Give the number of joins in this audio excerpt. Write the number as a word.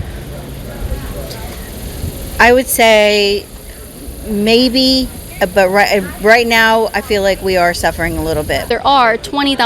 one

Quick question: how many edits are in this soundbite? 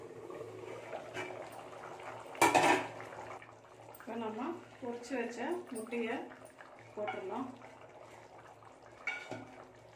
zero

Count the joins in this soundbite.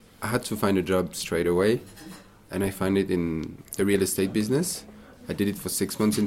one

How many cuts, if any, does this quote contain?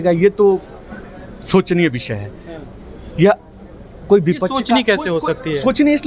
zero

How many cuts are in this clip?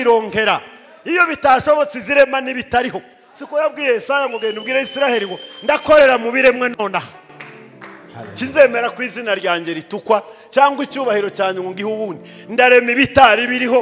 zero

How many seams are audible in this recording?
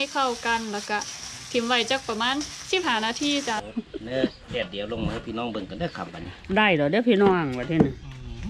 one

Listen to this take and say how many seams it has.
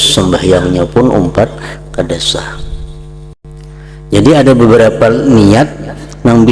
one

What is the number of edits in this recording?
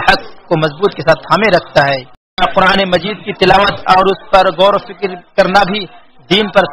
one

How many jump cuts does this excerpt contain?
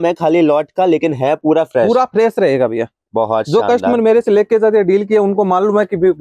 zero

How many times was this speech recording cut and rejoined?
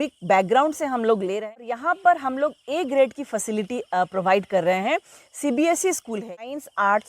two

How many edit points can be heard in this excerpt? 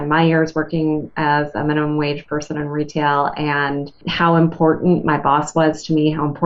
one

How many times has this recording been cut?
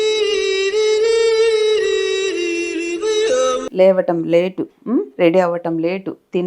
one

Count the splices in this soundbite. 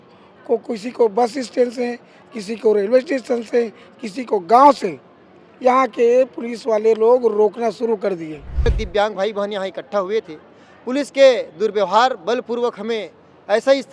one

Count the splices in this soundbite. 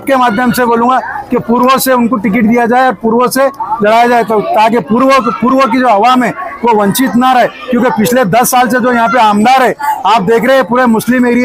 zero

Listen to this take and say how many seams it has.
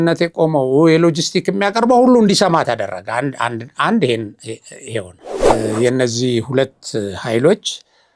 one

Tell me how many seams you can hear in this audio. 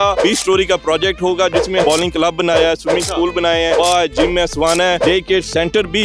two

